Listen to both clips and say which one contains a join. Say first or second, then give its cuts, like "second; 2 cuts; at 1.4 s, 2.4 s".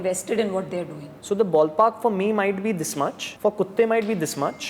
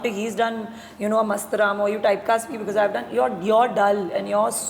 first; 1 cut; at 1.1 s